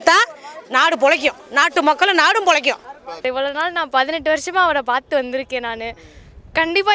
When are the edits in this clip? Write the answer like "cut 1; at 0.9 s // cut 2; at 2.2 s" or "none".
cut 1; at 3.1 s